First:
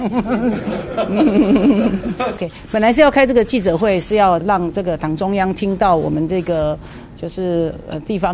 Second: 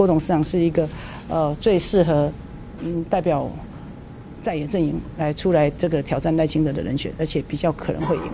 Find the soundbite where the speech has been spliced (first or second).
first